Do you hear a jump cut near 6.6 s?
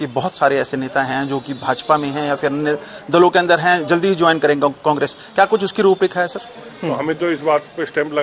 yes; 1 cut; at 6.6 s

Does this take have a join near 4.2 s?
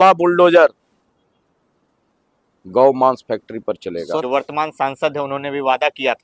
yes; 1 cut; at 4.2 s

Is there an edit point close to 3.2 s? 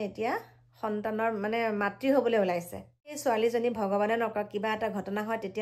yes; 1 cut; at 3.2 s

